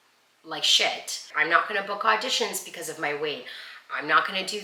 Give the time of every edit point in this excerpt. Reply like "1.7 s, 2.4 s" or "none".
1.3 s